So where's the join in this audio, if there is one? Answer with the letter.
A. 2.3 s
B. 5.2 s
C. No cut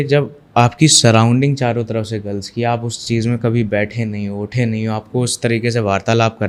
C